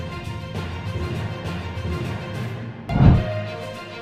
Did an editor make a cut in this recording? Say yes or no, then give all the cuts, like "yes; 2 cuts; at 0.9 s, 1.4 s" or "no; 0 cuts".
no; 0 cuts